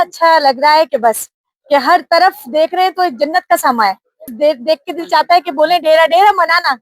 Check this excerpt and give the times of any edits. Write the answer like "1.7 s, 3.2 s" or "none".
4.3 s